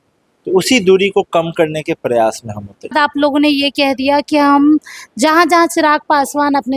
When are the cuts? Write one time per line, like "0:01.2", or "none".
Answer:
0:02.9